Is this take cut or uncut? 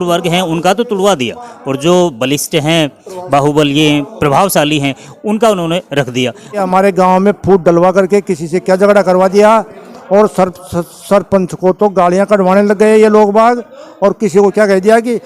cut